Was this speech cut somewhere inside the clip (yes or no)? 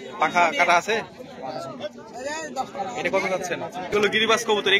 yes